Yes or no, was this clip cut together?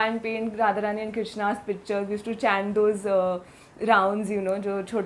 no